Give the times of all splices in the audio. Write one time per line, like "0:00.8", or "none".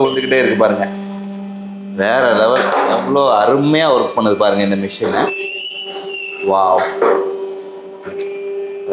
none